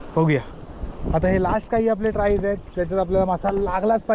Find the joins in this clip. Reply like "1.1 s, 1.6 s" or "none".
none